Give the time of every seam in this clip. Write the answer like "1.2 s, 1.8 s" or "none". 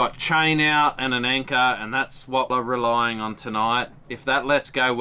2.5 s

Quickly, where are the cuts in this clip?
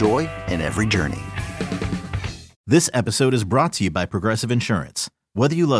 2.5 s

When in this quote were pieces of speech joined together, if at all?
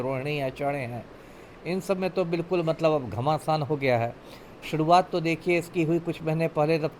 none

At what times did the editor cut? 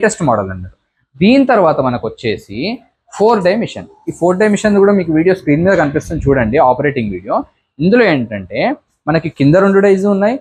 none

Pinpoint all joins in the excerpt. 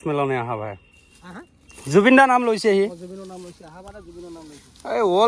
none

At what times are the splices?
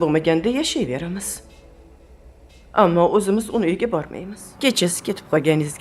3.9 s

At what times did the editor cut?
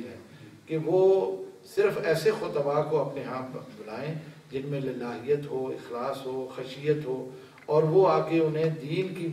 none

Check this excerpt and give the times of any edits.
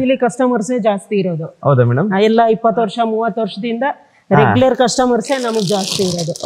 none

